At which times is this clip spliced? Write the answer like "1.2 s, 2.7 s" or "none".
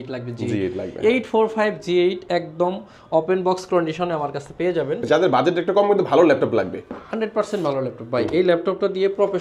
5.0 s